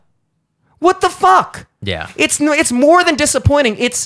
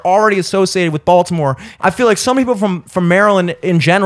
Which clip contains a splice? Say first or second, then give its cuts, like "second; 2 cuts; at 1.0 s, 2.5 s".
second; 1 cut; at 1.7 s